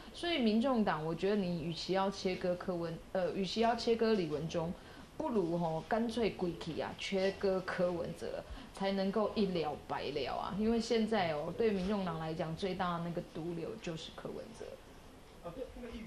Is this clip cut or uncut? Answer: uncut